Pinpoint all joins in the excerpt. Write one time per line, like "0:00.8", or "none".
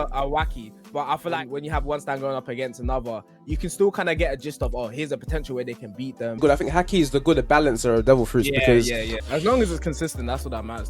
0:01.4
0:06.4
0:09.0